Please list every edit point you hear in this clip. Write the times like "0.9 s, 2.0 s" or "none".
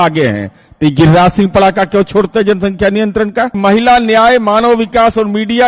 3.6 s

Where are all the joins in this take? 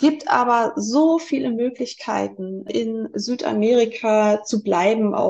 2.7 s

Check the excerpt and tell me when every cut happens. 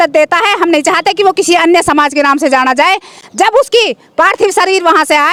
none

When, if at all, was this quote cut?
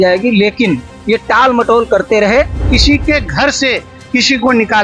2.6 s

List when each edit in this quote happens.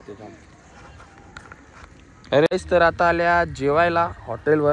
2.5 s

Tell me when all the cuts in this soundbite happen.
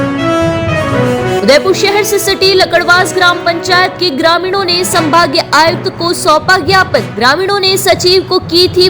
1.4 s

